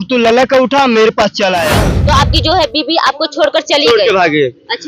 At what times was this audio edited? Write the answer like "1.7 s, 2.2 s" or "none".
1.9 s